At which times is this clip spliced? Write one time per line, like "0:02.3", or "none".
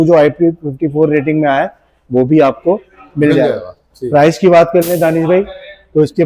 none